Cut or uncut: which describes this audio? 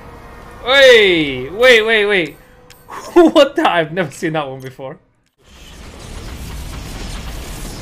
cut